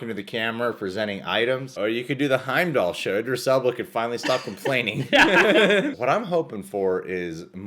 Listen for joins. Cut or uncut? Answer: cut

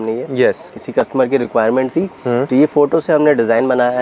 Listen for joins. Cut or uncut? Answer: uncut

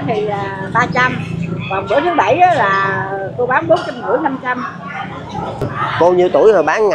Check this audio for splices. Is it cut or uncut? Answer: cut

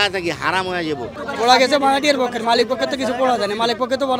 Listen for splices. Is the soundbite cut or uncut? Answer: cut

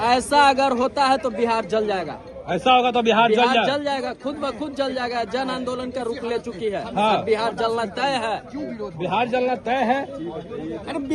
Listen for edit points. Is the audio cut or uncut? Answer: uncut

